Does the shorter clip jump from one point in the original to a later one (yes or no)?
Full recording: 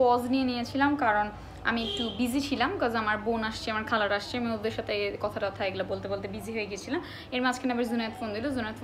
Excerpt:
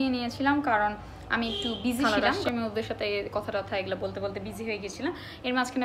yes